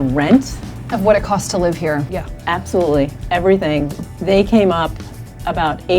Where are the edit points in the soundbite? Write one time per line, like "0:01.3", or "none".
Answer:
0:02.1